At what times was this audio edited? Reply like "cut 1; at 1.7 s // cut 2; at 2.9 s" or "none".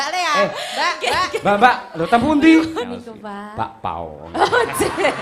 cut 1; at 2.8 s